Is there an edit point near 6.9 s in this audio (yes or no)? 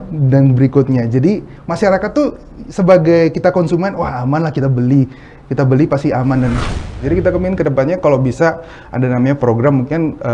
yes